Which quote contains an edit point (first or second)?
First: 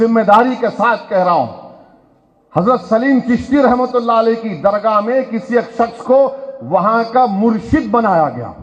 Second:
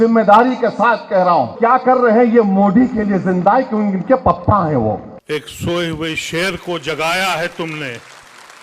second